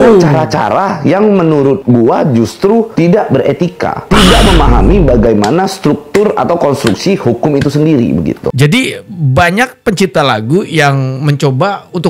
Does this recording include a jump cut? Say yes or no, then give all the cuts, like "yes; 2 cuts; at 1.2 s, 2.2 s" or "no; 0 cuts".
no; 0 cuts